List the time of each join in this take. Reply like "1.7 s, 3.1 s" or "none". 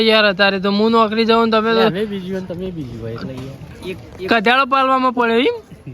3.5 s